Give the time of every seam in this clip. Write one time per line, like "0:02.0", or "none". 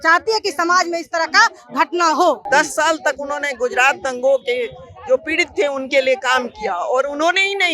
0:02.4